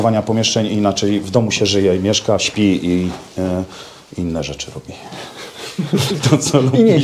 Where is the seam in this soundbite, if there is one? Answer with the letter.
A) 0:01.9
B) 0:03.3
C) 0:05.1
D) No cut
D